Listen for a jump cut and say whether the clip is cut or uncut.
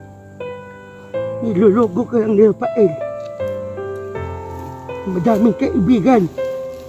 uncut